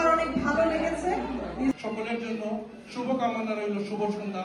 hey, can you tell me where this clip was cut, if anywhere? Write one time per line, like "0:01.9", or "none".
0:01.7